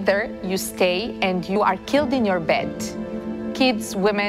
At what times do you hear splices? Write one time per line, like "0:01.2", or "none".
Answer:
0:01.5

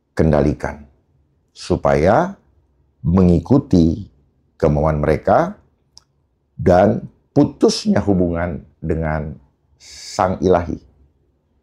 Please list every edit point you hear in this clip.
none

